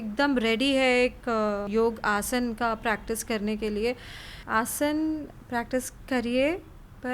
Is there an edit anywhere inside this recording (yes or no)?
yes